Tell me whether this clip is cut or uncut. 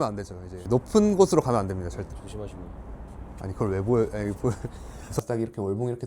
cut